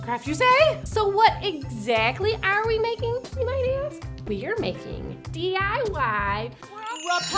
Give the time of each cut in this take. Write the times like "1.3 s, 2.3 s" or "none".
4.2 s